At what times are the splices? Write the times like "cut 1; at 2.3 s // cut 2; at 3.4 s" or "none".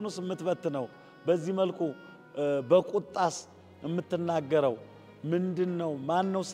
none